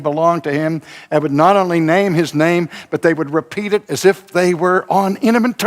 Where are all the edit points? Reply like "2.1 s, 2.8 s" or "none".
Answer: none